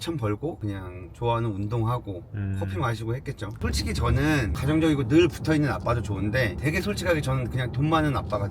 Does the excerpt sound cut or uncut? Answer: uncut